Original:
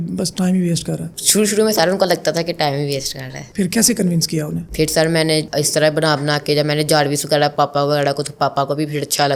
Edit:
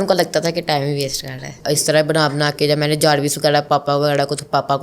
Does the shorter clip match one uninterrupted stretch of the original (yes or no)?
no